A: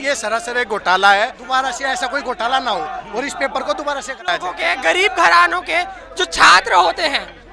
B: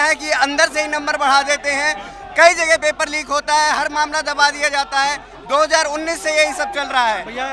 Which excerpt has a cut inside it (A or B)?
A